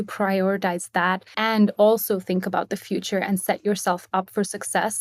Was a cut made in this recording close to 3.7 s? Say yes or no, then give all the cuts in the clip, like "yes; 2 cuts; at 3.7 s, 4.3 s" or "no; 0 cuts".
no; 1 cut; at 1.3 s